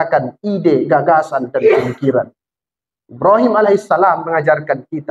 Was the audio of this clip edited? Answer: no; 0 cuts

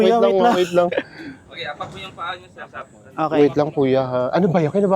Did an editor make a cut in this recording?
yes; 1 cut; at 3.3 s

